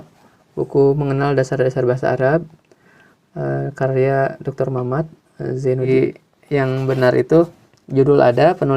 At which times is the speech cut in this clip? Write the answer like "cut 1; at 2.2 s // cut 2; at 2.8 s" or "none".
cut 1; at 5.9 s